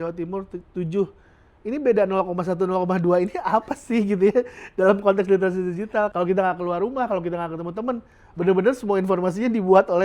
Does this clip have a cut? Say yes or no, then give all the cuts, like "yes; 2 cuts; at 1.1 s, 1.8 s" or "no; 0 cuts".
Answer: yes; 1 cut; at 6.1 s